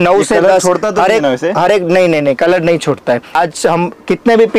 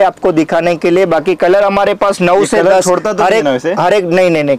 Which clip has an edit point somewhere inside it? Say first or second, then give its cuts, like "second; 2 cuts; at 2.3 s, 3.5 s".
first; 1 cut; at 3.3 s